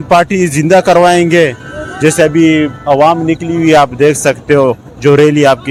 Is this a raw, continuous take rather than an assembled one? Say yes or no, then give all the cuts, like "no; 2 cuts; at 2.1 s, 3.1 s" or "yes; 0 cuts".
yes; 0 cuts